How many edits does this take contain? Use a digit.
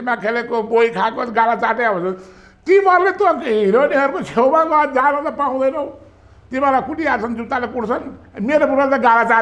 0